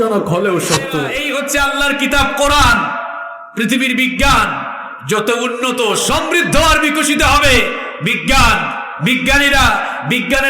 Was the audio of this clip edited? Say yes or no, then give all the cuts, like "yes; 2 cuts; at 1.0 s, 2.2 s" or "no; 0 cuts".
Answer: yes; 1 cut; at 1.1 s